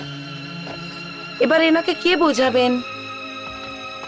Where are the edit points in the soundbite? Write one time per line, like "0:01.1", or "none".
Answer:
none